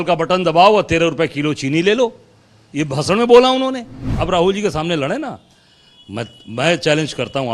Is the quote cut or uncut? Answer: cut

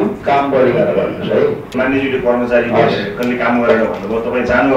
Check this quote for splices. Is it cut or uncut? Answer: cut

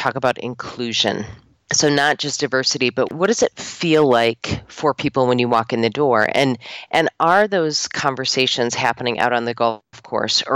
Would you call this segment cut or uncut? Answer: uncut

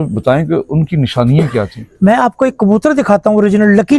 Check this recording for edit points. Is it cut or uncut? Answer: uncut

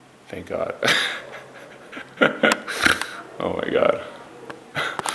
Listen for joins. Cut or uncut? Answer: uncut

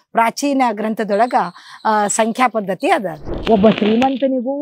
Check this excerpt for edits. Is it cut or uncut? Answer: cut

